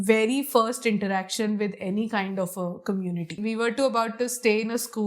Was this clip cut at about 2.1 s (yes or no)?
no